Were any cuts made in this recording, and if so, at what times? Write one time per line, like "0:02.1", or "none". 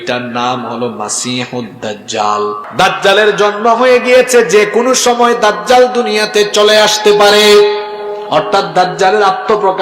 0:02.6